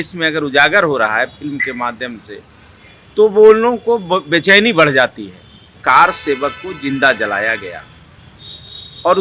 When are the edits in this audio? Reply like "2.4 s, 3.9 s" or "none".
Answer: 5.8 s